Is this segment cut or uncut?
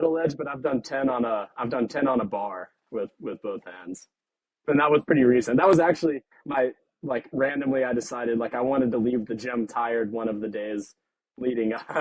cut